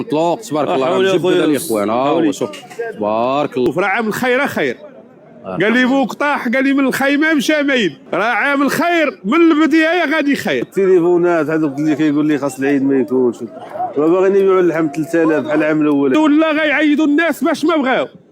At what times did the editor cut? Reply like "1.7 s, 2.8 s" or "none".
3.7 s, 8.0 s, 10.7 s, 16.1 s